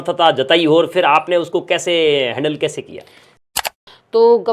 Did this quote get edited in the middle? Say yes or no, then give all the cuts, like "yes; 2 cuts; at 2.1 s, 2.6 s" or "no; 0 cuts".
yes; 1 cut; at 3.5 s